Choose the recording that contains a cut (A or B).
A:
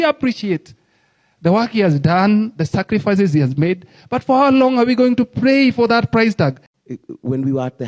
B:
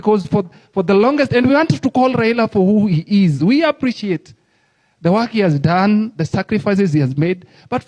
A